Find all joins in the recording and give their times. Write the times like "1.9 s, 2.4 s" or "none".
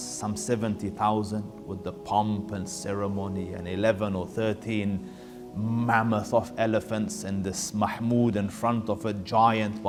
none